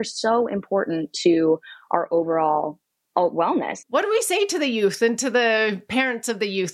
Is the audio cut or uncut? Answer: cut